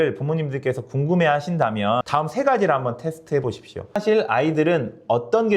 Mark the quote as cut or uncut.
cut